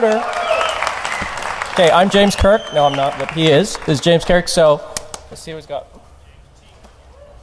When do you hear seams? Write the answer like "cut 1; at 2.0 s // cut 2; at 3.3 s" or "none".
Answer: none

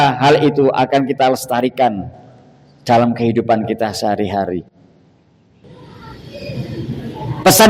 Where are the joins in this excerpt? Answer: cut 1; at 5.6 s

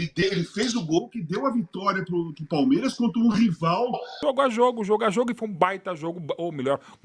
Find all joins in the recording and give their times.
cut 1; at 4.1 s

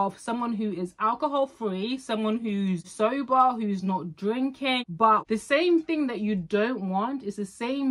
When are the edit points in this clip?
cut 1; at 2.9 s // cut 2; at 5.1 s

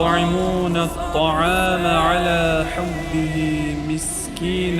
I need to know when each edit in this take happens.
none

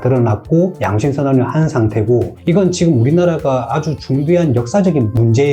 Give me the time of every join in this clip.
cut 1; at 2.3 s

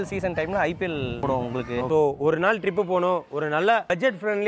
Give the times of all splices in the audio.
cut 1; at 1.9 s

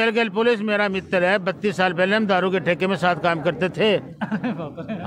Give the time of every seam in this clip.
none

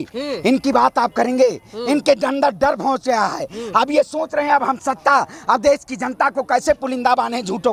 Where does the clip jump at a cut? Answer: none

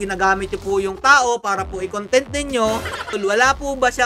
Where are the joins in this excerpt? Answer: cut 1; at 3.1 s

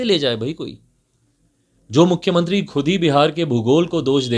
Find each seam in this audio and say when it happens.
none

